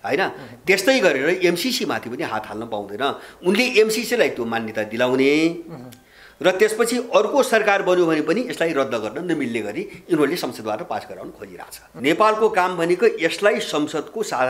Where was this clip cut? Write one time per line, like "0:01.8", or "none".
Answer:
0:11.8